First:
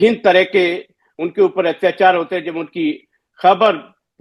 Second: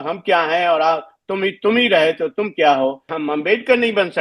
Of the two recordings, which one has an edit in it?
second; 1 cut; at 3.1 s

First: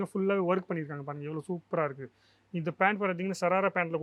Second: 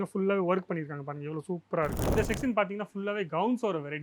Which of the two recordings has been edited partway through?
second; 1 cut; at 2.1 s

